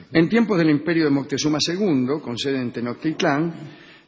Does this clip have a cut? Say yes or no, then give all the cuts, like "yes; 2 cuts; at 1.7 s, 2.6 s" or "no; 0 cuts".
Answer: yes; 1 cut; at 2.9 s